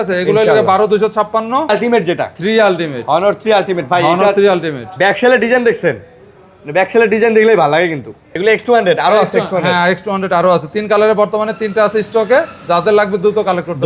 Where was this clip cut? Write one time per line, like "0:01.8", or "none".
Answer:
0:01.7
0:08.3